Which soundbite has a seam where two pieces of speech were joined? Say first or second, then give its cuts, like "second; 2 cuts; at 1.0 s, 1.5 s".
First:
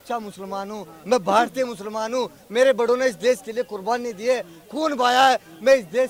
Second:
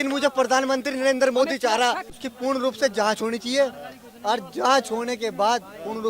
second; 1 cut; at 2.1 s